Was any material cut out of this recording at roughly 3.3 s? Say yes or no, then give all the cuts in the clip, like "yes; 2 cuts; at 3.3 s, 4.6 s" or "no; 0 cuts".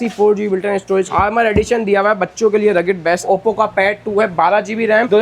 yes; 2 cuts; at 1.1 s, 3.3 s